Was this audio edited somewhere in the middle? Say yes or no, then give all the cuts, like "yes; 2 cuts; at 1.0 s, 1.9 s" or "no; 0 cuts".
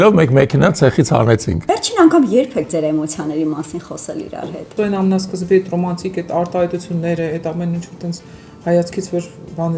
yes; 2 cuts; at 1.5 s, 4.7 s